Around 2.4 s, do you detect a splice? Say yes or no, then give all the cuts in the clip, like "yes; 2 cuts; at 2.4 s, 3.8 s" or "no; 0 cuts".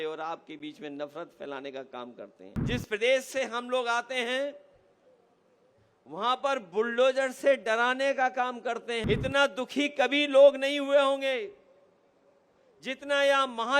yes; 1 cut; at 2.4 s